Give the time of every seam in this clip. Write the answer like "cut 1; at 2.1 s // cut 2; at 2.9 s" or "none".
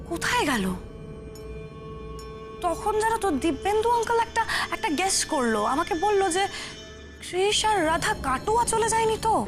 none